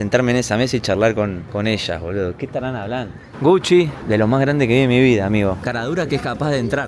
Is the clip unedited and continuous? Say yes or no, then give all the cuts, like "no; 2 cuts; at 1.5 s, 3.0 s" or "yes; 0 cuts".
no; 3 cuts; at 1.4 s, 3.2 s, 5.7 s